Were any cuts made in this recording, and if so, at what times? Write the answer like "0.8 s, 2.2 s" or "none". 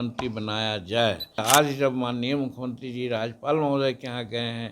1.4 s

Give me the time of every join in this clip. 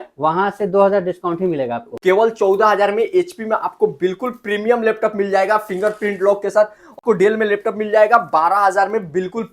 1.9 s, 7.0 s

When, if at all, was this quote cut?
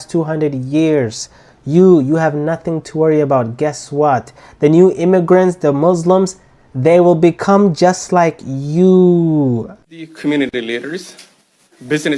9.6 s

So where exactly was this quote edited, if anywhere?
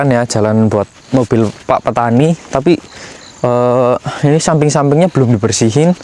none

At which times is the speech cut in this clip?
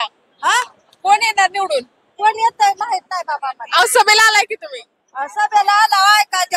none

